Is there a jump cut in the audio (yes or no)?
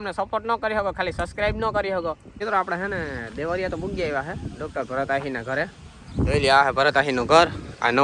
yes